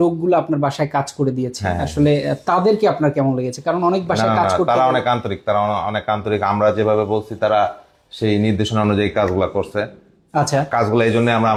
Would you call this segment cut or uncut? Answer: uncut